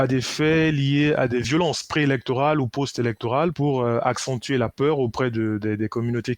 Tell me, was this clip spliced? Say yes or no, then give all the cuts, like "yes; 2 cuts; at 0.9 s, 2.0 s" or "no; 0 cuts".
yes; 2 cuts; at 1.5 s, 3.6 s